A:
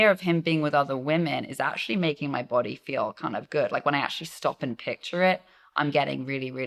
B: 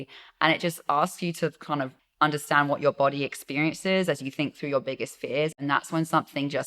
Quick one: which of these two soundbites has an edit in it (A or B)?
B